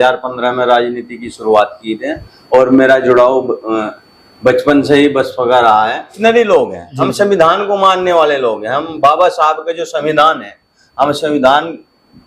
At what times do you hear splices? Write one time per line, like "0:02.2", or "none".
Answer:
0:06.1